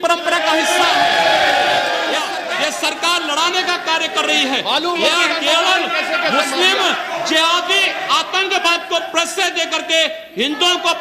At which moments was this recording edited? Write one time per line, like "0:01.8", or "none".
0:02.2